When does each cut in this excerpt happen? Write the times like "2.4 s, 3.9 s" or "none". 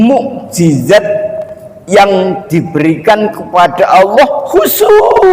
none